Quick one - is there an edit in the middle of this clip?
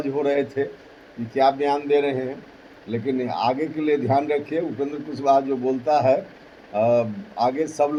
no; 0 cuts

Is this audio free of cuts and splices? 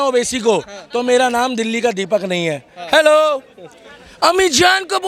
yes; 0 cuts

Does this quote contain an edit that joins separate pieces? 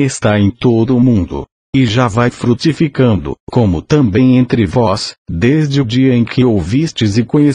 yes; 1 cut; at 5.9 s

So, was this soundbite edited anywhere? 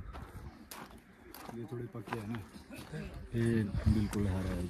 no; 0 cuts

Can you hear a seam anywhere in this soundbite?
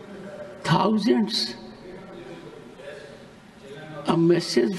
no; 0 cuts

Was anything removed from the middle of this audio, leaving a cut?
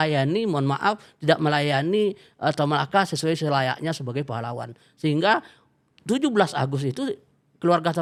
no; 0 cuts

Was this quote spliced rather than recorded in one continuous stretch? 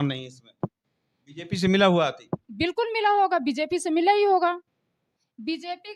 no; 0 cuts

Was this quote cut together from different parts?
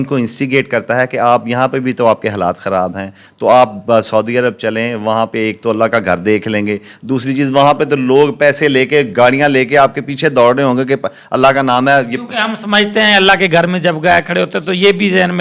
no; 0 cuts

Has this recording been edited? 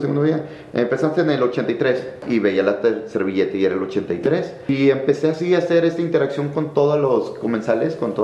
yes; 2 cuts; at 2.2 s, 4.7 s

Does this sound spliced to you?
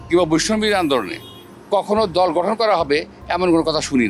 no; 0 cuts

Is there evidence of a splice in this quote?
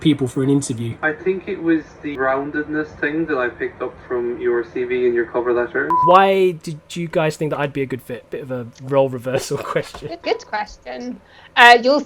yes; 3 cuts; at 1.0 s, 2.1 s, 5.9 s

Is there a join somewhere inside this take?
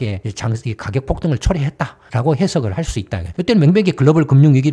no; 0 cuts

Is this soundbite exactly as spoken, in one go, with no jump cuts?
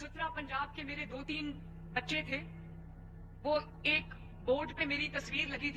yes; 0 cuts

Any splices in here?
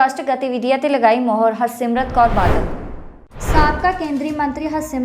no; 0 cuts

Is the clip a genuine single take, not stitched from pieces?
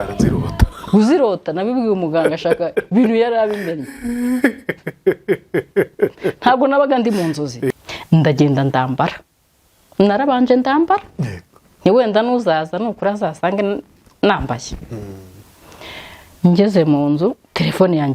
no; 1 cut; at 7.7 s

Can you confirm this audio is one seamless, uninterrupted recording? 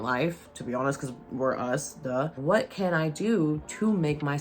no; 1 cut; at 2.4 s

